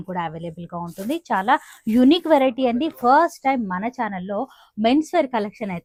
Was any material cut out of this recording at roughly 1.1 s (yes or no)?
no